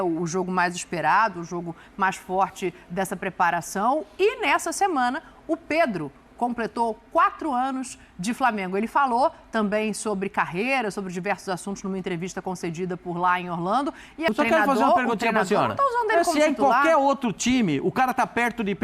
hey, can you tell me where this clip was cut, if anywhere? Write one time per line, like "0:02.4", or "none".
0:14.3